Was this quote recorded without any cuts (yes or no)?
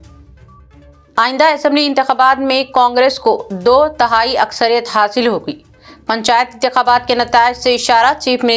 no